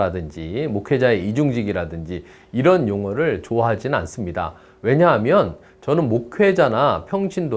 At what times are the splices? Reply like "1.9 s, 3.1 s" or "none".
none